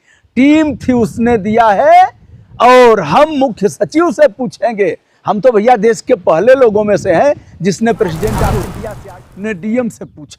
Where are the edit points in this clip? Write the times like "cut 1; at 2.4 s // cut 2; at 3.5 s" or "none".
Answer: cut 1; at 8.7 s